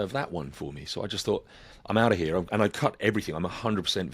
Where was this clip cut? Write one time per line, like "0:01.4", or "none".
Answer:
0:02.7